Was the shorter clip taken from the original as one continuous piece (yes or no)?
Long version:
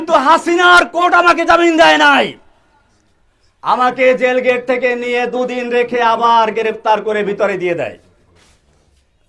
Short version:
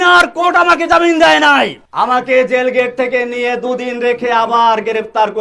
no